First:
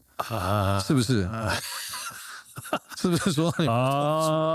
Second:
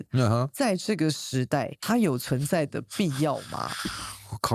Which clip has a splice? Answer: second; 1 cut; at 1.8 s

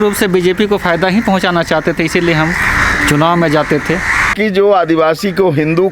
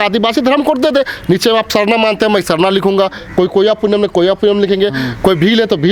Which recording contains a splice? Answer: first; 1 cut; at 4.3 s

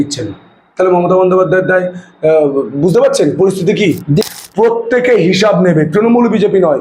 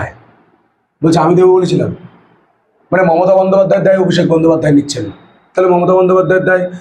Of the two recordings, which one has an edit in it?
first; 1 cut; at 4.2 s

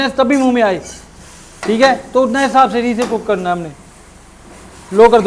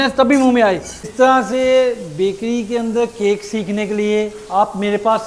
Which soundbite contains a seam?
second; 1 cut; at 1.1 s

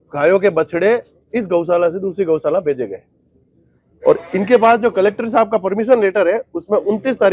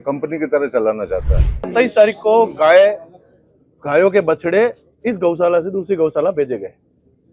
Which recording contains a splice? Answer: second; 1 cut; at 1.6 s

